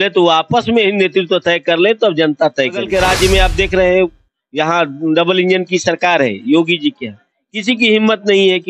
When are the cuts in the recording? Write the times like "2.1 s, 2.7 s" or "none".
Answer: 2.8 s